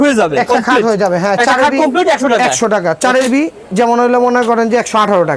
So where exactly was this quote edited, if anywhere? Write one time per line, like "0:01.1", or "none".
none